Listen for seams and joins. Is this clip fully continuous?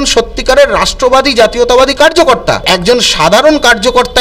no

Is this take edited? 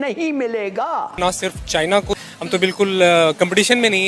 yes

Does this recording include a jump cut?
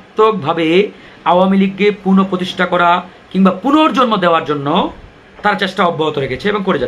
no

